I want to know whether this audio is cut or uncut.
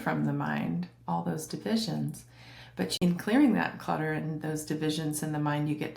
cut